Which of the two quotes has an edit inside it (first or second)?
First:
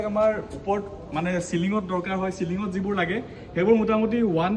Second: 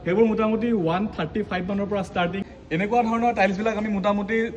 second